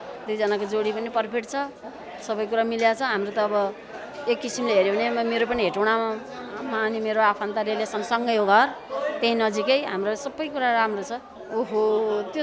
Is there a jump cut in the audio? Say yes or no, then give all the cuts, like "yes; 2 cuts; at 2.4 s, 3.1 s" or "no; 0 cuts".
yes; 1 cut; at 11.3 s